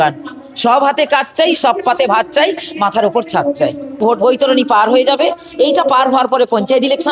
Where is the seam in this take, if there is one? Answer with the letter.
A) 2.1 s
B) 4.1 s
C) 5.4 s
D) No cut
B